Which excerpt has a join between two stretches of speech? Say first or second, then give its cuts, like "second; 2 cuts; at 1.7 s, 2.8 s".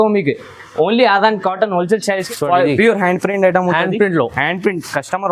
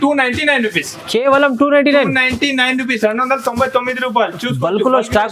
first; 1 cut; at 2.2 s